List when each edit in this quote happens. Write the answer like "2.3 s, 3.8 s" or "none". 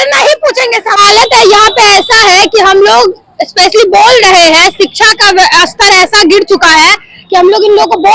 none